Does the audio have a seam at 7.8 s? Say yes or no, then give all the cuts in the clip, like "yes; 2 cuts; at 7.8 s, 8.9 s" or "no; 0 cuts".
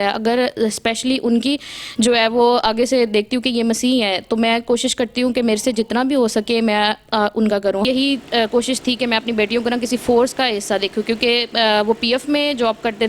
yes; 1 cut; at 7.8 s